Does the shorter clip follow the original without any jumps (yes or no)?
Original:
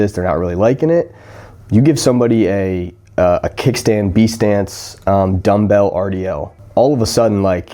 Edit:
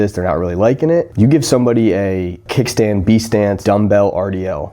no